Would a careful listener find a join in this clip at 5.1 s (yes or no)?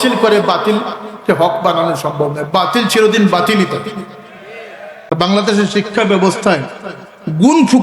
yes